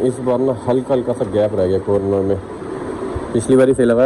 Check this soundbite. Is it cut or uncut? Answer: uncut